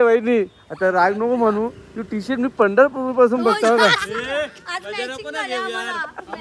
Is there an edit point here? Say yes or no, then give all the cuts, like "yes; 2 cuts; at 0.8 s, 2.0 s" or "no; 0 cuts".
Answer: yes; 1 cut; at 4.2 s